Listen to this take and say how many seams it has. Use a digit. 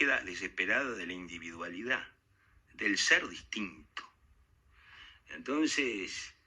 0